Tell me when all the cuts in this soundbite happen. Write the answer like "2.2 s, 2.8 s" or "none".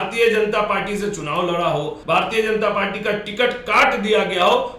2.0 s